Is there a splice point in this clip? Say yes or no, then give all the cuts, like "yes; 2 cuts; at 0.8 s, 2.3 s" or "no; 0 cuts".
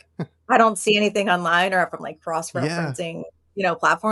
no; 0 cuts